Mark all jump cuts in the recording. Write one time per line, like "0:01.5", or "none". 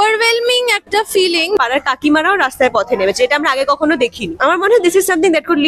0:01.6
0:04.3